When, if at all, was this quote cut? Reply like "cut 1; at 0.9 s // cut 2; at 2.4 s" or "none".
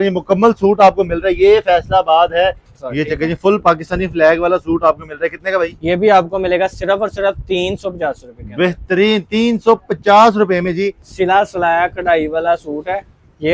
cut 1; at 2.7 s // cut 2; at 11.0 s